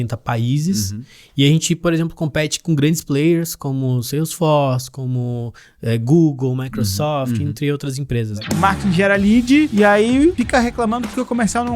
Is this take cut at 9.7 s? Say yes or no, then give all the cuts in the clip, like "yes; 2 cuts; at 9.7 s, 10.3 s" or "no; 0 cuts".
yes; 3 cuts; at 8.3 s, 9.7 s, 10.3 s